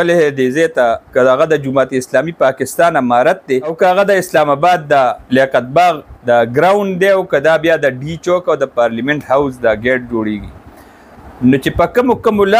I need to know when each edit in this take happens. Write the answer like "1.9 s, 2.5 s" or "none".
1.1 s, 3.7 s, 5.2 s, 6.1 s